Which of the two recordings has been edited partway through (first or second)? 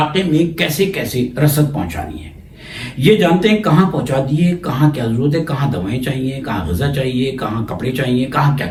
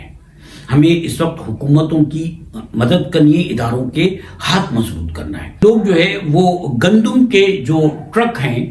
second